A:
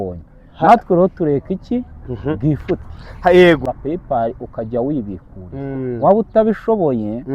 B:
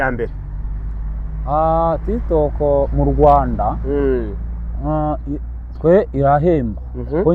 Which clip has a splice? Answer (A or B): A